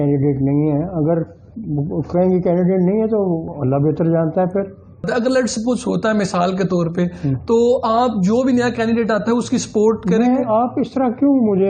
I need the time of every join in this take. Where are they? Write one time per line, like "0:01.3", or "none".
0:03.5
0:05.1